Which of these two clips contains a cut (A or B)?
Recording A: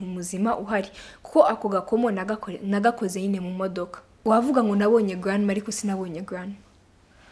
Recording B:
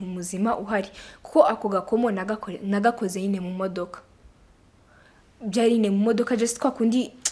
A